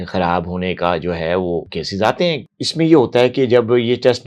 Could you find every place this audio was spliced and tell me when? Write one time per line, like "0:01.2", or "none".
0:02.4

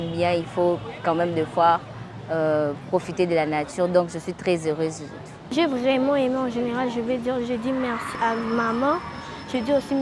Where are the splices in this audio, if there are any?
0:05.5
0:08.0

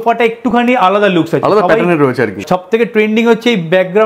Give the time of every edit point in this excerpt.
0:02.4

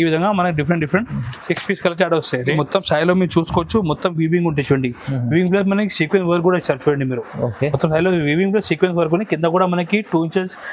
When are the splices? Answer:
0:02.5

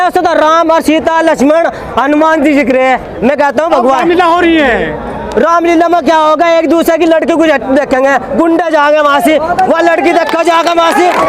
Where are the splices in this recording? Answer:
none

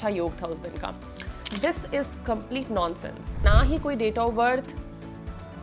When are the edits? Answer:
0:03.4

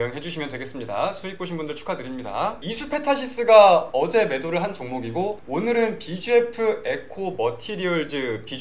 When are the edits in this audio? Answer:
0:02.6

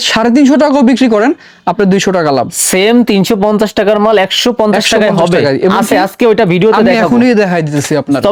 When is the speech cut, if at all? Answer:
none

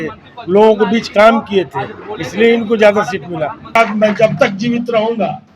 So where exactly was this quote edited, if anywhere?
0:03.8

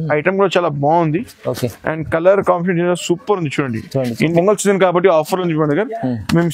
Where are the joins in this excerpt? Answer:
0:04.3

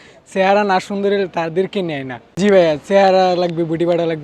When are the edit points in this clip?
0:02.3

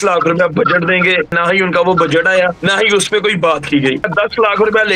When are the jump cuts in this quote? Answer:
0:01.4
0:02.6
0:04.1

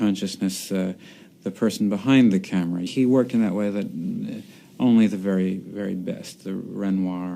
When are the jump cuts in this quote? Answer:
0:04.8

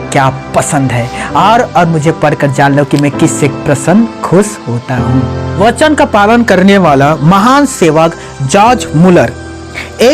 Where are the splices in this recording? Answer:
0:05.6

